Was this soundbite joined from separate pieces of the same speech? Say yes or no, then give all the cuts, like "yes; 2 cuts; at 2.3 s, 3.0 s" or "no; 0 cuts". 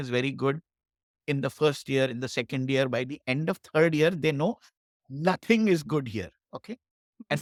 no; 0 cuts